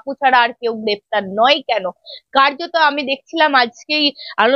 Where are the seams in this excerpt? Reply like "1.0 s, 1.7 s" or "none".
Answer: none